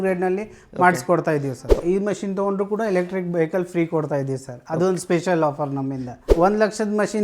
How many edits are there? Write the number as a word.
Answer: two